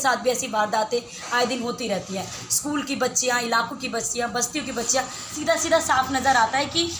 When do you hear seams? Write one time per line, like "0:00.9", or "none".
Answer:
0:05.3